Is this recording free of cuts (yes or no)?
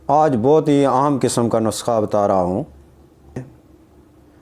no